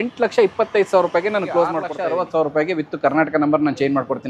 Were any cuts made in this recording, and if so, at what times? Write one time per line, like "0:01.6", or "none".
0:01.9